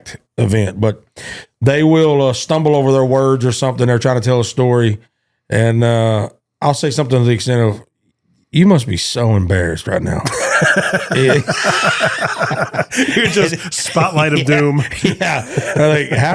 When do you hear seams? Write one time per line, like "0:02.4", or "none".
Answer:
none